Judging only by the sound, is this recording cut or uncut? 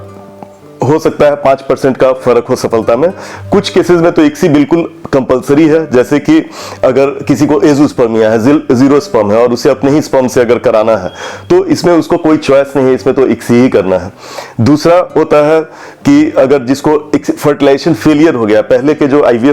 uncut